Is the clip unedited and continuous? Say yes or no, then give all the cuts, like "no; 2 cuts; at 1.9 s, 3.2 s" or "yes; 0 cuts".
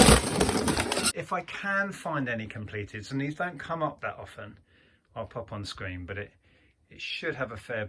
no; 1 cut; at 1.1 s